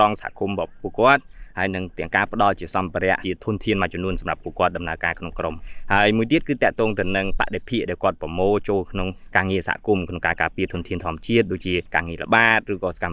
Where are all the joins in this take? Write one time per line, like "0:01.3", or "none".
0:03.2
0:05.7
0:09.2